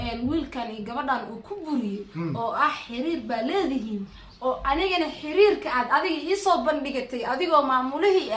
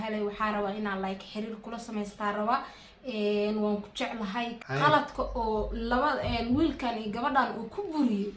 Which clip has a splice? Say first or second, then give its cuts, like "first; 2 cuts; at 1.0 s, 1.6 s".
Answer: second; 1 cut; at 4.6 s